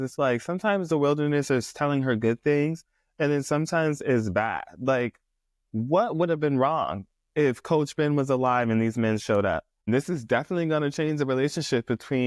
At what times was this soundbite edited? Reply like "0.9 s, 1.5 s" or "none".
9.9 s